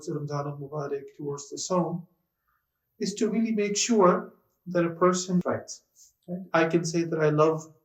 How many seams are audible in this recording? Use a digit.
1